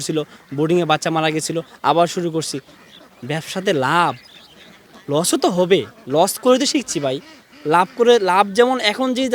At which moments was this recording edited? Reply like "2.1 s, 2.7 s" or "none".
none